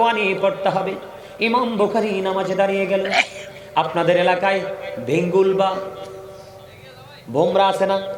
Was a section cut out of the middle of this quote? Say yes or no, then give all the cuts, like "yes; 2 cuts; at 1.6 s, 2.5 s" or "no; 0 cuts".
no; 0 cuts